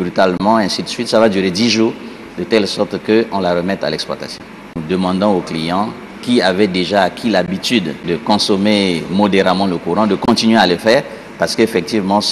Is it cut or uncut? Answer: cut